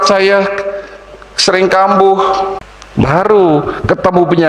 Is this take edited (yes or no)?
yes